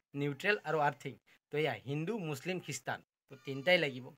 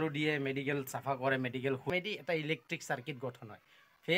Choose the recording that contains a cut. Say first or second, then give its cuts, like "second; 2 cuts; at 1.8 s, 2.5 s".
second; 1 cut; at 1.9 s